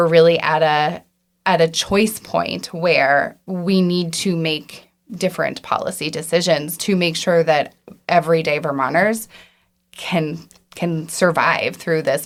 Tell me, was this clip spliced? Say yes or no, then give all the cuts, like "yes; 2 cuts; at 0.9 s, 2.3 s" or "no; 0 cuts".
no; 0 cuts